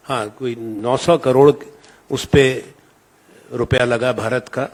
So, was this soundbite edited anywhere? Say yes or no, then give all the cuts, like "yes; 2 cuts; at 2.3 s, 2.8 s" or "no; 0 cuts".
no; 0 cuts